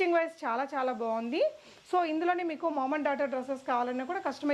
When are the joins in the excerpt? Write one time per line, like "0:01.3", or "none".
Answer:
none